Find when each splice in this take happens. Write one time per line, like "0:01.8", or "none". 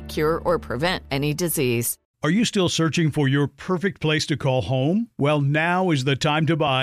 0:02.0